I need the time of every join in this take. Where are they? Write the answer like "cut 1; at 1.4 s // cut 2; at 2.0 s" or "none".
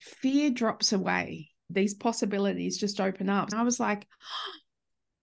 cut 1; at 1.6 s // cut 2; at 3.5 s